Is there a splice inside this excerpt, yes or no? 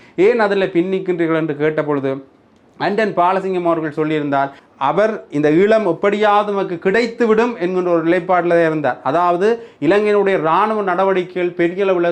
yes